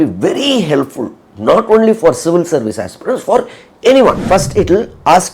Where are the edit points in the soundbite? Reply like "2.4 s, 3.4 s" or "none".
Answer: 4.2 s